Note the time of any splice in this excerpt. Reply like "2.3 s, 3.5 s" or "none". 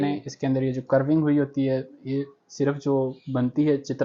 none